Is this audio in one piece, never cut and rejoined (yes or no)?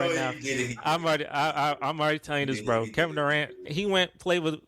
no